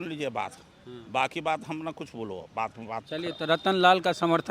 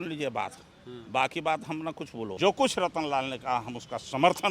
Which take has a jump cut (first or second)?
second